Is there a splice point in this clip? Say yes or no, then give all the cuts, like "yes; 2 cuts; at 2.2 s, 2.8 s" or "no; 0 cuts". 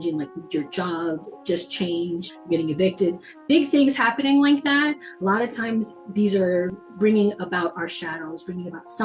yes; 1 cut; at 6.8 s